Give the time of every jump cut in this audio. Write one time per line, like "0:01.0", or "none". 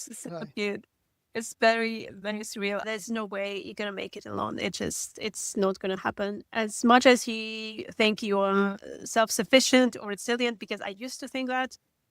0:02.9